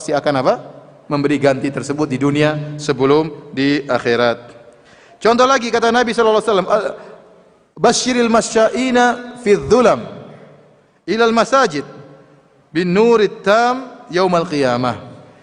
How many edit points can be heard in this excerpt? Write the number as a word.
zero